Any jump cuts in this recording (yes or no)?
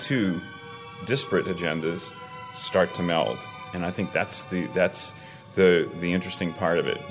no